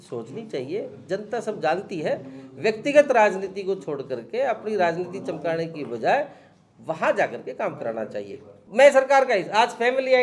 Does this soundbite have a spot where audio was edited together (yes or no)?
no